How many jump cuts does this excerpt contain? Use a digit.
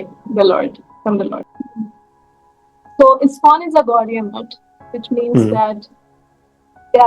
1